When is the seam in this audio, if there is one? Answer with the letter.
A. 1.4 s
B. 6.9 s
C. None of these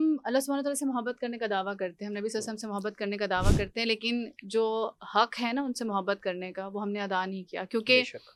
C